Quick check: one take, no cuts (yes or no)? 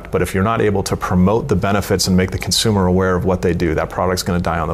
yes